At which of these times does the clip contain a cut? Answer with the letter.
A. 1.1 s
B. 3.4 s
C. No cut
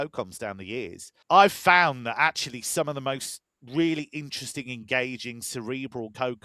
A